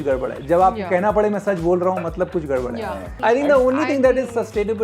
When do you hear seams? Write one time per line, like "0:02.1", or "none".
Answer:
0:03.1

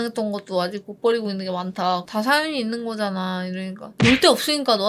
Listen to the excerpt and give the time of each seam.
0:03.9

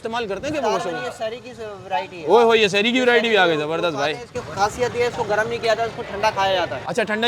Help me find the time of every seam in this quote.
none

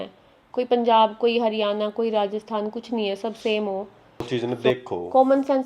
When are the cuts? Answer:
0:04.6

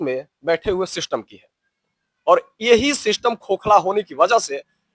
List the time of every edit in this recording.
none

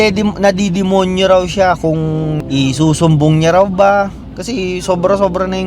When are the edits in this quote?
0:02.4
0:04.2

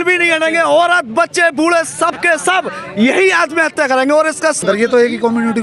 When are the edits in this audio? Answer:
0:04.6

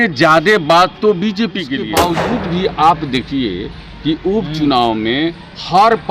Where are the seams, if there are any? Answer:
0:01.8

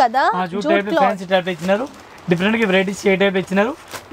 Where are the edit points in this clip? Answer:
none

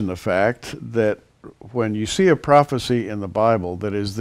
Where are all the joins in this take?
0:02.1

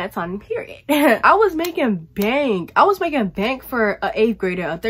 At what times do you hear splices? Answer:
0:01.2

